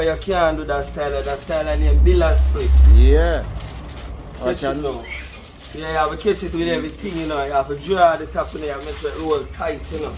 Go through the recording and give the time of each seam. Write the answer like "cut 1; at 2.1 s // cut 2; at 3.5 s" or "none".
none